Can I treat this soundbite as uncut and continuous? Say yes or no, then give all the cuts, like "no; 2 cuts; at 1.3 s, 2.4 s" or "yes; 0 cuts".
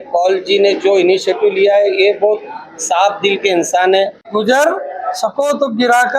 no; 1 cut; at 4.2 s